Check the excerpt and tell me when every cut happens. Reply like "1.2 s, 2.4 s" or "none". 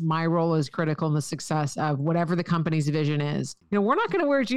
3.6 s